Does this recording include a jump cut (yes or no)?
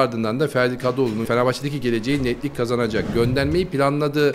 yes